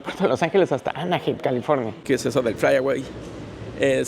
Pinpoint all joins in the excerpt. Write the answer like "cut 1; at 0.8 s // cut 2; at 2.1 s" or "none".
cut 1; at 2.0 s

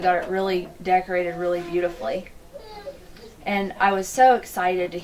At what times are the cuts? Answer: none

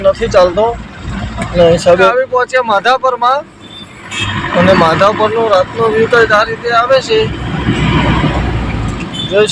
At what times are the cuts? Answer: cut 1; at 2.1 s

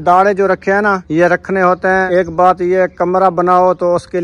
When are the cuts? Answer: cut 1; at 1.0 s // cut 2; at 2.1 s

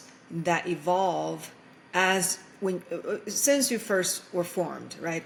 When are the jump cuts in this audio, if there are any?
none

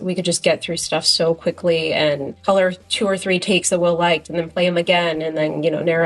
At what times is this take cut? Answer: cut 1; at 2.3 s

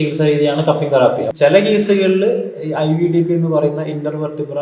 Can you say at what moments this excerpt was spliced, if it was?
cut 1; at 1.3 s

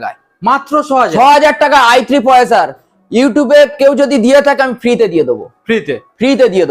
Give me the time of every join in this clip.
none

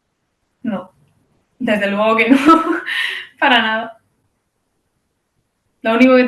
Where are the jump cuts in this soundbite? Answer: none

